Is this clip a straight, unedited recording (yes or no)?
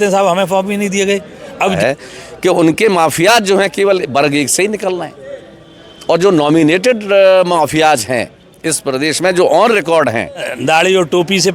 no